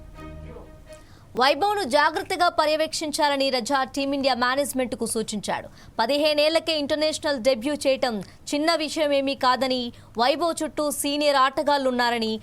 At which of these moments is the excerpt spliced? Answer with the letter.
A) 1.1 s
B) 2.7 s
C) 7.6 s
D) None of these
A